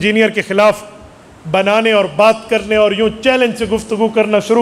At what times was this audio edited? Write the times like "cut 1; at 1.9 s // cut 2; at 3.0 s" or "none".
none

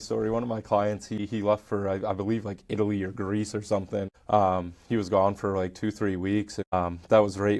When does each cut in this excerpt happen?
cut 1; at 1.2 s // cut 2; at 4.2 s // cut 3; at 6.7 s

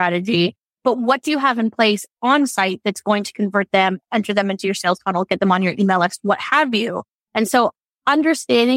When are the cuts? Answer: none

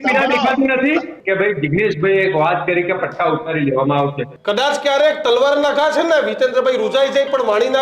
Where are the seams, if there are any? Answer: cut 1; at 1.1 s // cut 2; at 4.3 s

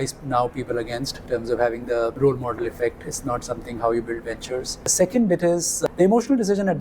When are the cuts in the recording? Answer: cut 1; at 1.2 s // cut 2; at 2.1 s // cut 3; at 4.8 s // cut 4; at 5.7 s

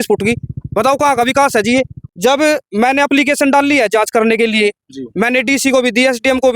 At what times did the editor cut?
cut 1; at 2.0 s

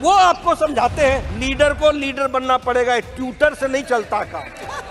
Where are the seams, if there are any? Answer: cut 1; at 1.3 s

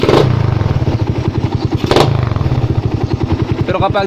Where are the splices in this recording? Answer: cut 1; at 1.4 s // cut 2; at 3.4 s

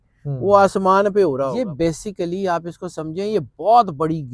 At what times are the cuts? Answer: cut 1; at 1.5 s

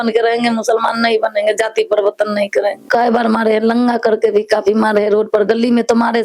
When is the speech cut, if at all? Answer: cut 1; at 2.8 s

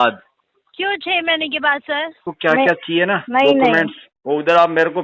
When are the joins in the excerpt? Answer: cut 1; at 2.3 s

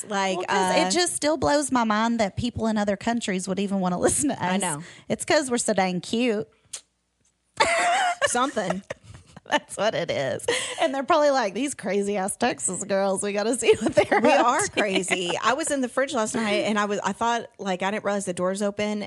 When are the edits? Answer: none

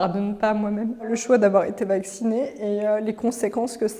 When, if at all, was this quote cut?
cut 1; at 1.1 s

